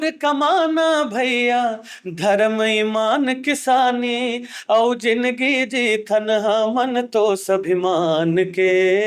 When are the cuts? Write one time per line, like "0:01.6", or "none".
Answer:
none